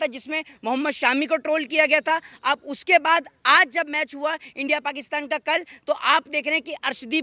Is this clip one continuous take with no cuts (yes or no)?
yes